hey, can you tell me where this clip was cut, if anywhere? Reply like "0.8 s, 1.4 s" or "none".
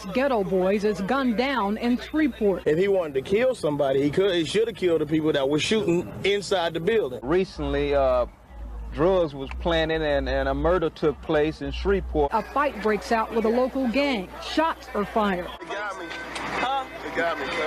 2.6 s, 7.2 s, 12.3 s, 15.6 s